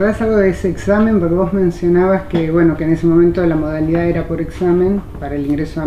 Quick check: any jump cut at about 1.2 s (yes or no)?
yes